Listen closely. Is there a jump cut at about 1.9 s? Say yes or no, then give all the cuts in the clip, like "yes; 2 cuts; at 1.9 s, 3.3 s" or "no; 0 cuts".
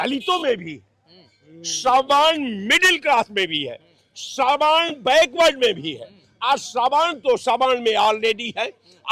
no; 0 cuts